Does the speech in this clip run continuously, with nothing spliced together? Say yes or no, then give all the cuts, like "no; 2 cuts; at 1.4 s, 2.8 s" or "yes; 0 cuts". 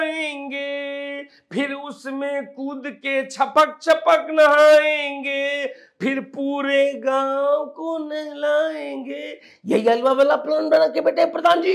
yes; 0 cuts